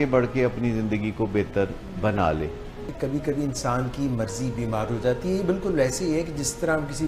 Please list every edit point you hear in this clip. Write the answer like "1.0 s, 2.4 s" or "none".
none

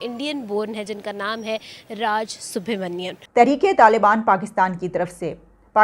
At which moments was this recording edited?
3.2 s

